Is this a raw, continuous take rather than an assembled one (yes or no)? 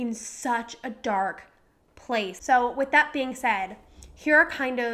no